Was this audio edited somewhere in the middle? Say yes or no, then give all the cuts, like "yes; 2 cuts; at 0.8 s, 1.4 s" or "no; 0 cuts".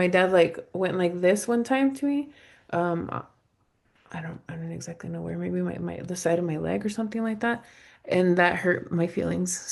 no; 0 cuts